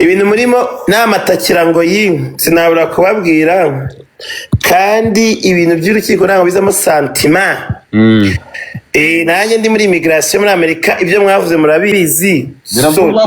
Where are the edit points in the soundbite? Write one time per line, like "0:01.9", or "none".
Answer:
none